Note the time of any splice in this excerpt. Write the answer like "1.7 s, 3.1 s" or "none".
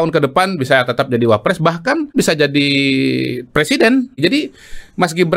2.1 s, 4.2 s